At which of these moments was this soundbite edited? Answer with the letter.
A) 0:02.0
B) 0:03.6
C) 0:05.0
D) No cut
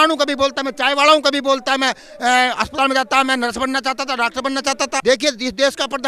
C